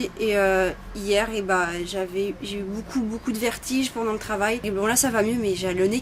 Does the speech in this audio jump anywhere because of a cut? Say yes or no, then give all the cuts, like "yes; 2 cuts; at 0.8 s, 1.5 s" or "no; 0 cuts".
yes; 1 cut; at 3.0 s